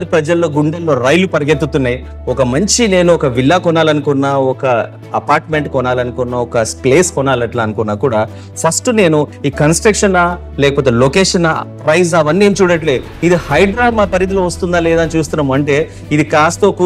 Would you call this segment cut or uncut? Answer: uncut